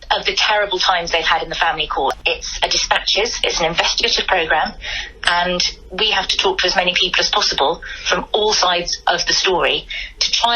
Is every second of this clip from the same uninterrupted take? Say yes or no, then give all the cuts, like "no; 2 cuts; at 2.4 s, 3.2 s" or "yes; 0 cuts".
no; 1 cut; at 2.2 s